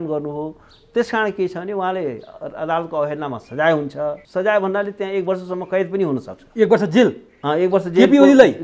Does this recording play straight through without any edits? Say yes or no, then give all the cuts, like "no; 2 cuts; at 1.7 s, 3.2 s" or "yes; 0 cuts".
no; 1 cut; at 4.2 s